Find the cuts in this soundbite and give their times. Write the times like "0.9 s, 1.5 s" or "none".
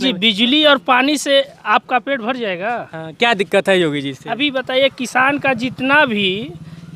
none

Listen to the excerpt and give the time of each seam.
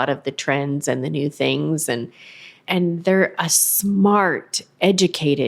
2.5 s

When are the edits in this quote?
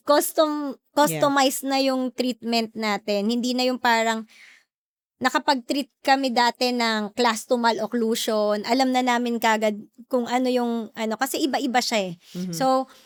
none

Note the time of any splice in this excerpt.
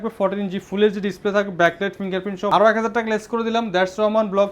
2.5 s

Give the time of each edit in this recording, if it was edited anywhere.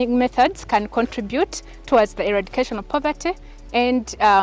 none

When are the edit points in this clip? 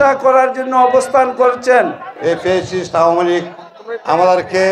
2.1 s

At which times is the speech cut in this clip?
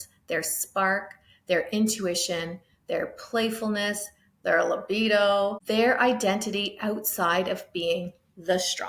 5.6 s

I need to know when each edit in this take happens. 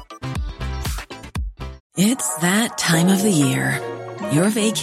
1.8 s

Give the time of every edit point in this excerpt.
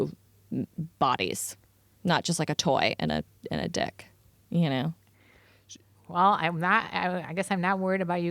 none

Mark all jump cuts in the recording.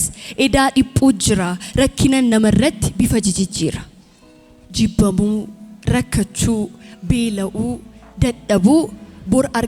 none

